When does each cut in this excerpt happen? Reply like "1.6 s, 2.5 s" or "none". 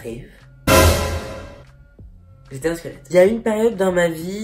none